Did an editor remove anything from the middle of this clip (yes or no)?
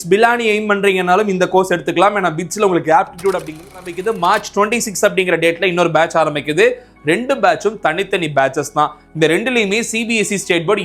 yes